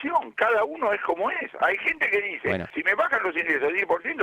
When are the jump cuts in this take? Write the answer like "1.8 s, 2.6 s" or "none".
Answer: 2.7 s